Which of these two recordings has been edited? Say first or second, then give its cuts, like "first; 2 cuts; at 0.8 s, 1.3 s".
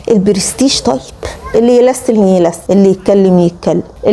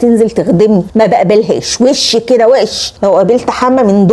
first; 1 cut; at 1.5 s